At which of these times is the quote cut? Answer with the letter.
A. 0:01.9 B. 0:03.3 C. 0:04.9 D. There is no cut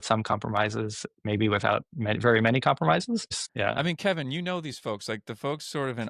B